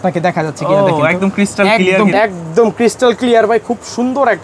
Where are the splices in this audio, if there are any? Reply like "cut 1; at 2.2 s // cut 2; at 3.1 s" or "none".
cut 1; at 2.1 s

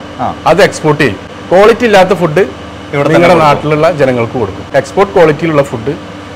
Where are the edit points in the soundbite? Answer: cut 1; at 1.3 s // cut 2; at 4.6 s

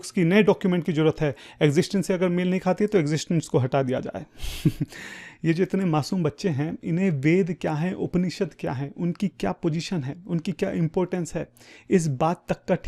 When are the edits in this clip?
none

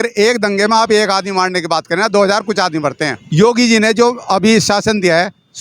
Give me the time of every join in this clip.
cut 1; at 3.2 s

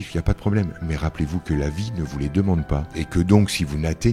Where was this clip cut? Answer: cut 1; at 2.9 s

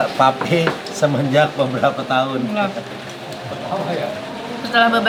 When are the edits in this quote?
none

